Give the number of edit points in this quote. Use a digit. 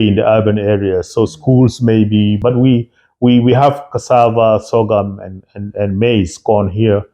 1